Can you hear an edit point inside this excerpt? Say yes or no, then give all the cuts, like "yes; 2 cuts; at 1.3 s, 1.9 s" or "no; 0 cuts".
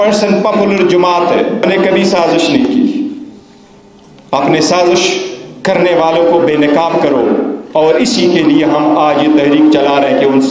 yes; 1 cut; at 1.6 s